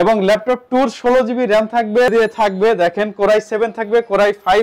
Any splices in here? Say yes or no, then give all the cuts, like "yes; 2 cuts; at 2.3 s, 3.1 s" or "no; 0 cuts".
yes; 1 cut; at 2.1 s